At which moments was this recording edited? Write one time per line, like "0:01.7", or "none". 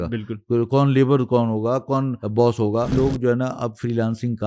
0:02.2
0:03.4

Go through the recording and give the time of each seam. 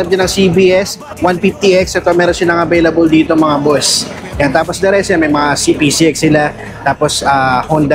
none

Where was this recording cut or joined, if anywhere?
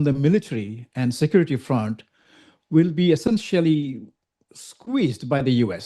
none

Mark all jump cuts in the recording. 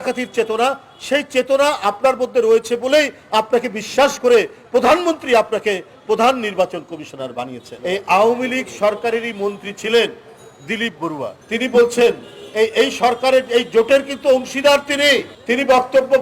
0:07.7
0:11.4

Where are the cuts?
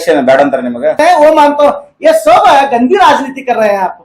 0:01.0

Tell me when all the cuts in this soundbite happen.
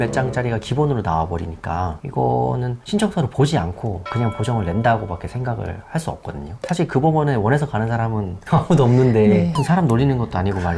0:02.0
0:06.6
0:09.6

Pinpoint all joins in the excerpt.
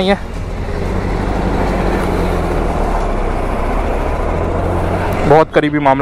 none

